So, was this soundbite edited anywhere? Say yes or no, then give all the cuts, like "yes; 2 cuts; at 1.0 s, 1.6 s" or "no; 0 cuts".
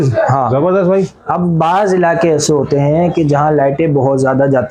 no; 0 cuts